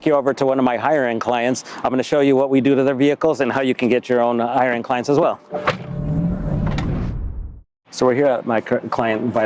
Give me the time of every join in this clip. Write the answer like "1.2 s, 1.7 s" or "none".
none